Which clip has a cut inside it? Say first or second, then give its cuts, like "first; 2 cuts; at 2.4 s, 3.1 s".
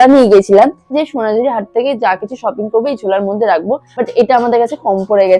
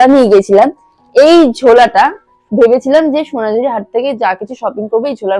first; 2 cuts; at 1.0 s, 3.9 s